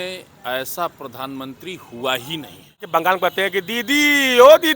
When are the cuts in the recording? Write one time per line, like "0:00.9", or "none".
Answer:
0:02.8